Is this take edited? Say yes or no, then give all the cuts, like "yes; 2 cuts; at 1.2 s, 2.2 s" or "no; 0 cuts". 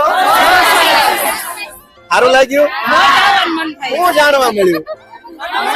no; 0 cuts